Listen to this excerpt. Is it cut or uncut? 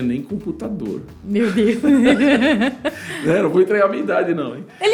uncut